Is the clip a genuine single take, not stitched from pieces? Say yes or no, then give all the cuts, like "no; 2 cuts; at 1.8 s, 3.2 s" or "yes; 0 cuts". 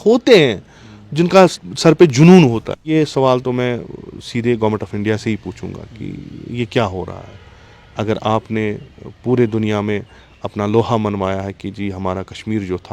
no; 1 cut; at 2.7 s